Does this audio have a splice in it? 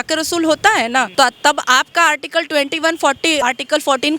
yes; 2 cuts; at 1.1 s, 3.4 s

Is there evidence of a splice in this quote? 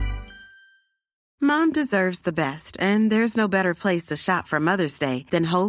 yes; 1 cut; at 1.2 s

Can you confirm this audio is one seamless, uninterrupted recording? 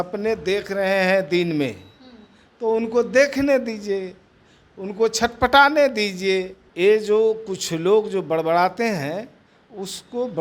no; 1 cut; at 6.6 s

